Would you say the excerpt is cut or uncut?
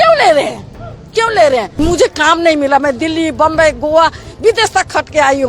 cut